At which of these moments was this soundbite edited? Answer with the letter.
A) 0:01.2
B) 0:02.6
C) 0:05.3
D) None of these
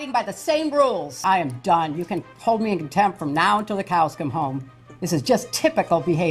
A